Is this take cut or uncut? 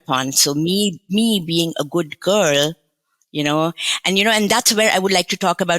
uncut